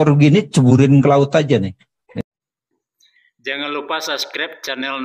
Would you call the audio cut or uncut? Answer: cut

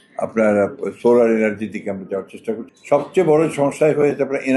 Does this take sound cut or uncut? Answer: cut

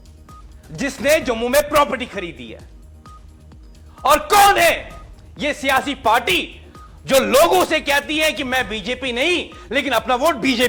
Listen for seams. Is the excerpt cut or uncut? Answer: uncut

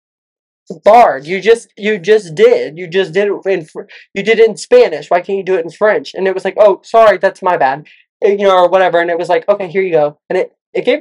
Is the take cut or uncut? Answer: uncut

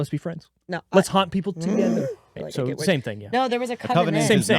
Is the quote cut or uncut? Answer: cut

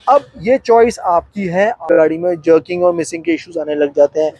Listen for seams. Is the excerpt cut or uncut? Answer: cut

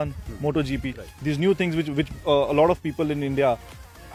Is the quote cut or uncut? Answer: uncut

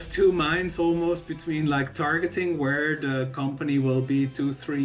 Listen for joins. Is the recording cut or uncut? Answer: uncut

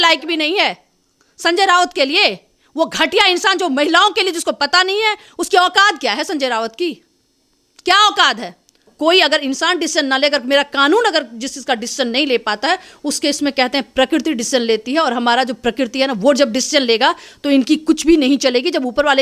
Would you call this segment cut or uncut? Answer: cut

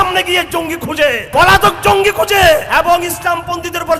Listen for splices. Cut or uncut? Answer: cut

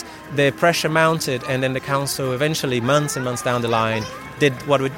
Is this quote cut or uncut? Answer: uncut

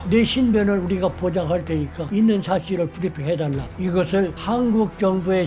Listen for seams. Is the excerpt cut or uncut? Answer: cut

